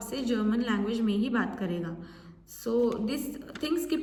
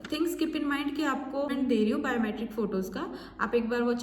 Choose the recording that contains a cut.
second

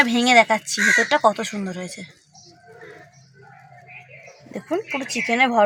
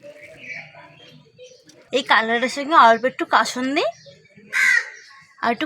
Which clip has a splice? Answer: second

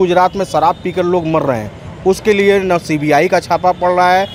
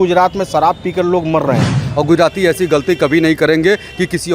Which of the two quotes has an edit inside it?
second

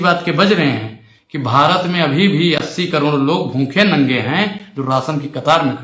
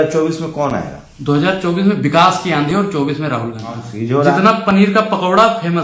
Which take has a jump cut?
second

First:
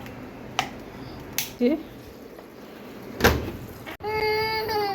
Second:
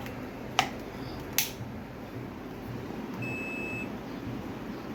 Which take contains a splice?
first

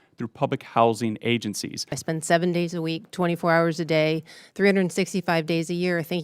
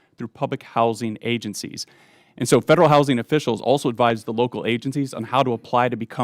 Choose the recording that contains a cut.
first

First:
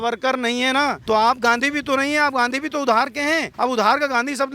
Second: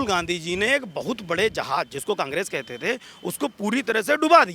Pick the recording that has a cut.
first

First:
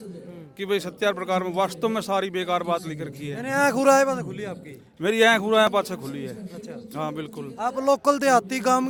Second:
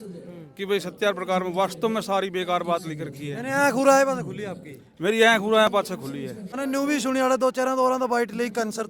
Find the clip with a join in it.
second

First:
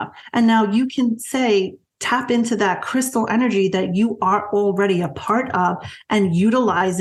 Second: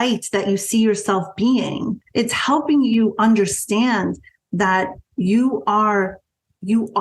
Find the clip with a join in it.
second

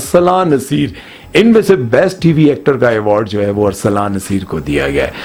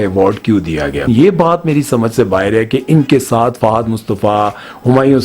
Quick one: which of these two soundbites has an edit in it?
second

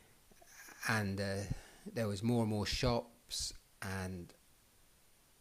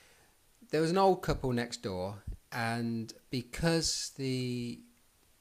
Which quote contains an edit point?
first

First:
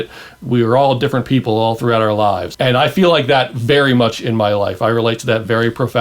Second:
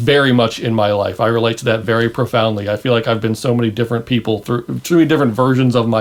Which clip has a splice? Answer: first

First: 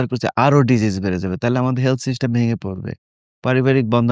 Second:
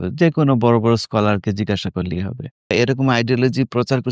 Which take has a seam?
second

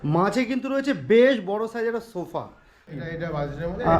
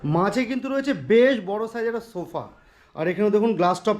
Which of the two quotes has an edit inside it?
first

